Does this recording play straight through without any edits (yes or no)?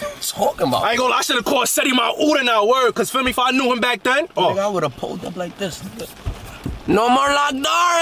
yes